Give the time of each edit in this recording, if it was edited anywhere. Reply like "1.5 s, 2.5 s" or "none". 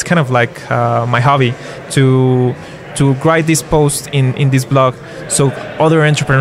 none